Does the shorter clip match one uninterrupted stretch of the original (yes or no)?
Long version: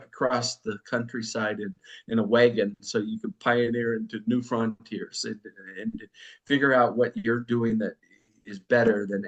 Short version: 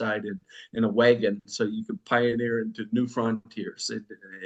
yes